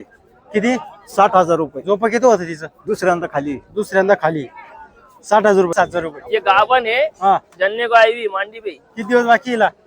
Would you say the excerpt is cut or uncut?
cut